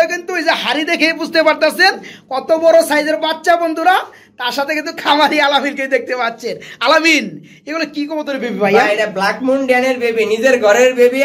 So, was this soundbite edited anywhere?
no; 0 cuts

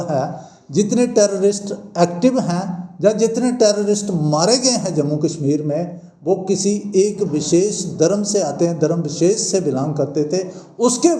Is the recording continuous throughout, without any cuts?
yes; 0 cuts

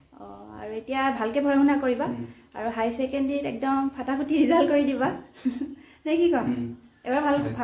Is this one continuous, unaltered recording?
yes; 0 cuts

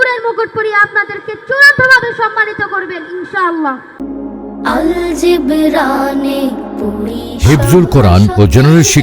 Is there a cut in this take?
yes; 1 cut; at 3.9 s

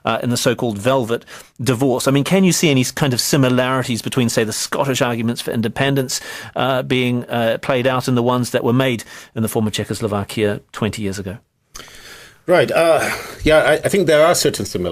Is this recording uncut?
yes; 0 cuts

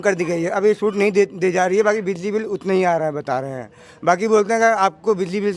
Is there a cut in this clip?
no; 0 cuts

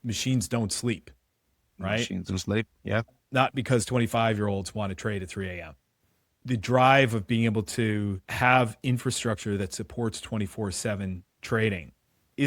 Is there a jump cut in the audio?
yes; 3 cuts; at 3.1 s, 6.4 s, 8.2 s

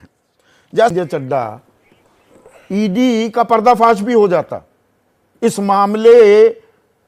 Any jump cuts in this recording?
yes; 1 cut; at 0.9 s

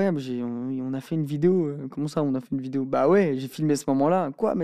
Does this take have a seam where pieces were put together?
no; 0 cuts

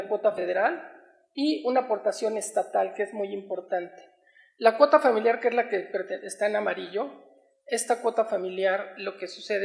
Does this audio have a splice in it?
yes; 1 cut; at 1.9 s

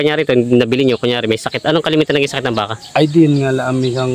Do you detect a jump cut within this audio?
no; 0 cuts

